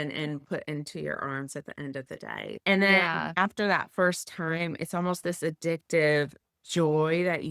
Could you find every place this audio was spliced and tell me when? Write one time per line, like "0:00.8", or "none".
0:02.5